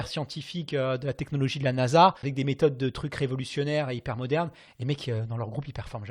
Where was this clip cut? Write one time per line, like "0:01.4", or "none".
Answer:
0:02.2